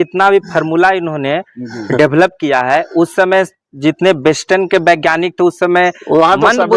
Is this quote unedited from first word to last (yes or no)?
yes